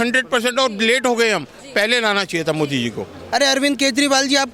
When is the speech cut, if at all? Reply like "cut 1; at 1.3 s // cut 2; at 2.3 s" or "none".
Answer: cut 1; at 3.2 s